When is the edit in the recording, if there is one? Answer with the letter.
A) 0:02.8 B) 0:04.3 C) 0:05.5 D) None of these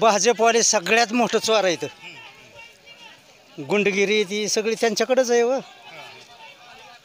D